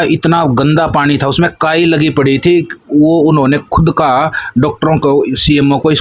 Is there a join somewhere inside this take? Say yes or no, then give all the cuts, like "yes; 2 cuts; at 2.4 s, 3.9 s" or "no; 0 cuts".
no; 0 cuts